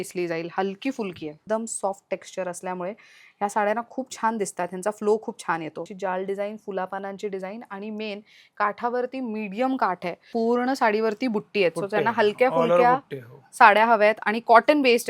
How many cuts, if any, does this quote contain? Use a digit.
3